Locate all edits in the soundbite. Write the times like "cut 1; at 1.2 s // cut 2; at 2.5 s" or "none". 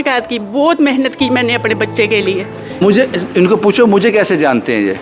cut 1; at 2.8 s